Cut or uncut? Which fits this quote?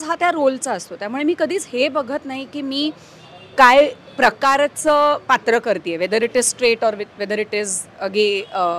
uncut